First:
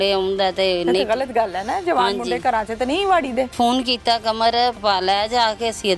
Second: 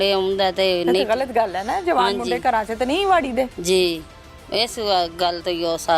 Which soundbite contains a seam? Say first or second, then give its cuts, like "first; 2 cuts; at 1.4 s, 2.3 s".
first; 2 cuts; at 3.5 s, 4.8 s